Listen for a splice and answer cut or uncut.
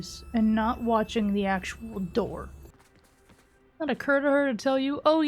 cut